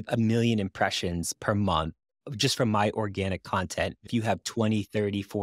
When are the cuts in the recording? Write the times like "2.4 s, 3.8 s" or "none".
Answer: 4.1 s

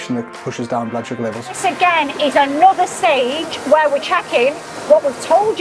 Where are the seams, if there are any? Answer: 1.6 s

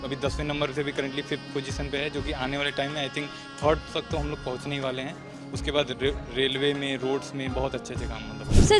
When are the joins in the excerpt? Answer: none

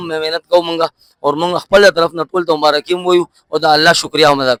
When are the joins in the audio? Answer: none

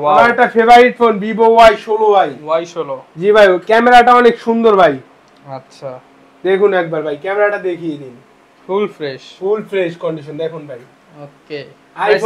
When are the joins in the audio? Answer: none

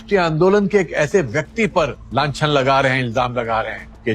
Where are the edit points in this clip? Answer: none

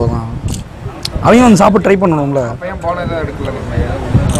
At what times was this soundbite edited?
none

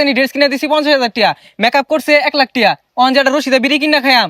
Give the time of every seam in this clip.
none

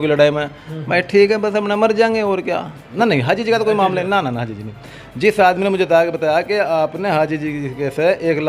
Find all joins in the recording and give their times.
2.8 s

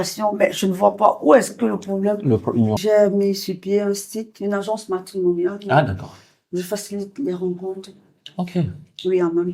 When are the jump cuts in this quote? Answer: 2.8 s

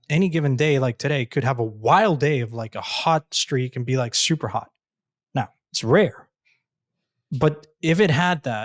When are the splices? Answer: none

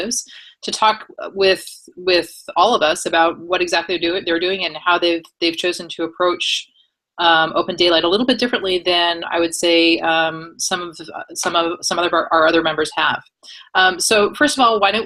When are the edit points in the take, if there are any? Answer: none

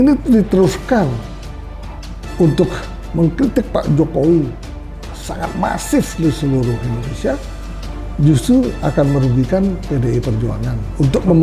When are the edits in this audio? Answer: none

